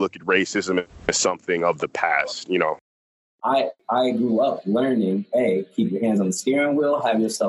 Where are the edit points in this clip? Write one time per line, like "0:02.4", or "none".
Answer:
0:03.0